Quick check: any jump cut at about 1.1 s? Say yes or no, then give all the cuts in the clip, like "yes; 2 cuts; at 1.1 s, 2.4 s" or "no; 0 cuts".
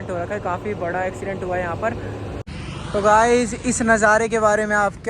no; 1 cut; at 2.4 s